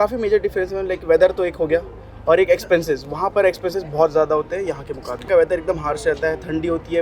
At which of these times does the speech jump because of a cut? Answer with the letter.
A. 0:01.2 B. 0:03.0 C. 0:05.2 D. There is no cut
C